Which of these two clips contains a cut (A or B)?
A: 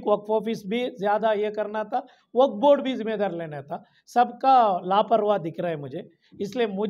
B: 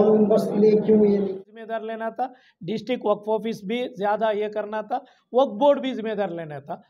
B